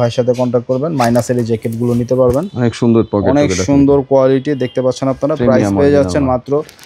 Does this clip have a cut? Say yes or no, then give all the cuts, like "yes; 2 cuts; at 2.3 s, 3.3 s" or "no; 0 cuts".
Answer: no; 0 cuts